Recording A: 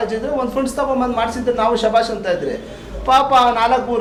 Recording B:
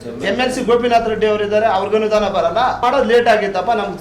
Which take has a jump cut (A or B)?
B